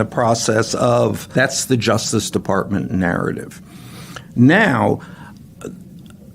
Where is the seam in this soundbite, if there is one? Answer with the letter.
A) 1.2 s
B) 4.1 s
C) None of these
A